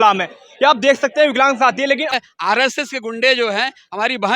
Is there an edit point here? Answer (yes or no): yes